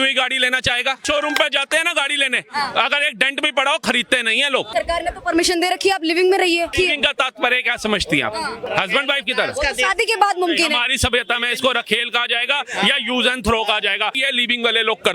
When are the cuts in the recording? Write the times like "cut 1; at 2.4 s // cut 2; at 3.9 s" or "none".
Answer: cut 1; at 1.0 s // cut 2; at 4.7 s // cut 3; at 6.7 s // cut 4; at 8.6 s // cut 5; at 14.2 s